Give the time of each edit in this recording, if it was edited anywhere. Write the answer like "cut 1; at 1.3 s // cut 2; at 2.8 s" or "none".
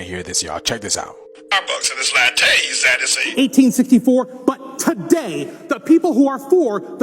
cut 1; at 3.3 s